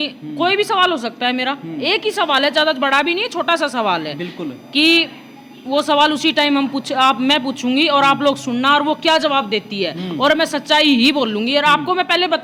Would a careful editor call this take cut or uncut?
uncut